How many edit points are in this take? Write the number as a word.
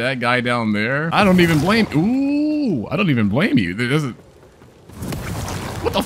one